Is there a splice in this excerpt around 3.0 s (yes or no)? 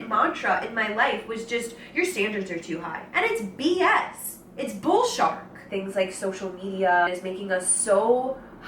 yes